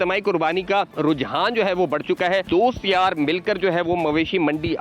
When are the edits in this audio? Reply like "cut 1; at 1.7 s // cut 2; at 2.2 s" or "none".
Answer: cut 1; at 0.9 s // cut 2; at 2.5 s

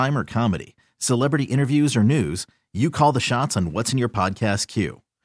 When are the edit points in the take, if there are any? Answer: none

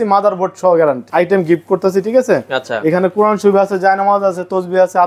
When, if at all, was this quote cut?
cut 1; at 1.0 s

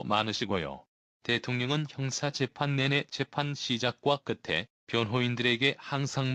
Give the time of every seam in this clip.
none

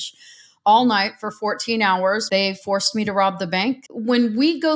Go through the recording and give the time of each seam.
cut 1; at 2.2 s // cut 2; at 3.9 s

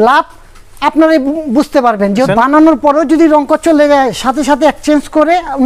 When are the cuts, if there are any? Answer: cut 1; at 2.3 s

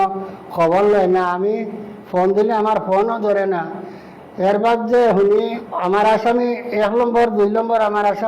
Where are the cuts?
cut 1; at 5.6 s

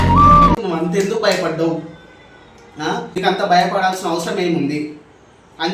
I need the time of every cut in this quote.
cut 1; at 3.1 s

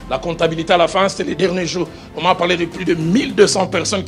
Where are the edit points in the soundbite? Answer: none

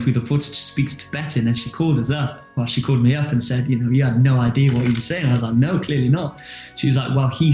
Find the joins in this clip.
none

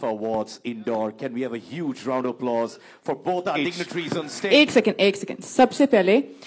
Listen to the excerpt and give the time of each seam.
cut 1; at 4.5 s

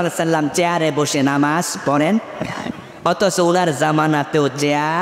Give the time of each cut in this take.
none

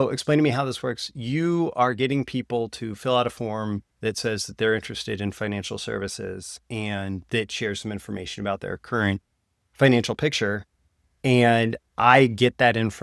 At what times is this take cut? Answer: none

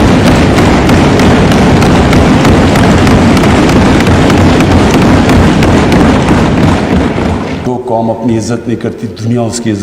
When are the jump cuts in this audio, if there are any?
cut 1; at 7.6 s

